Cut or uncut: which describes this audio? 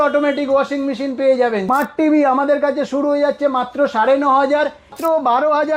cut